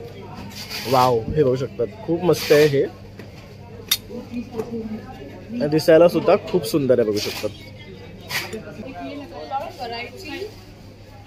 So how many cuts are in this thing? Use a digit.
1